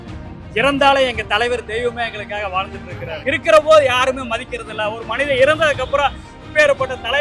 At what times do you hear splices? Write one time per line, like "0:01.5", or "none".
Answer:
0:03.1